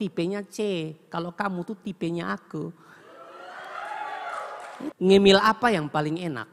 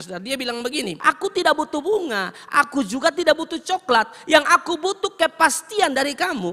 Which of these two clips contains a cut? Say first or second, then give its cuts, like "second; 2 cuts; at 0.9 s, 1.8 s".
second; 1 cut; at 0.9 s